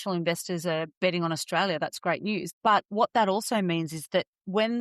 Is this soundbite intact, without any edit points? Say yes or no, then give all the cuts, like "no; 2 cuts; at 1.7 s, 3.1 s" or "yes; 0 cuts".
no; 2 cuts; at 1.0 s, 2.5 s